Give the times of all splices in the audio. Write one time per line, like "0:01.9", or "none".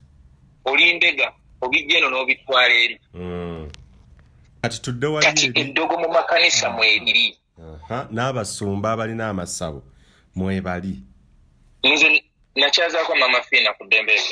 0:04.6